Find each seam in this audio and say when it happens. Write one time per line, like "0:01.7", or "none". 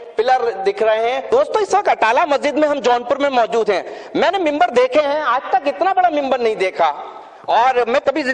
0:01.2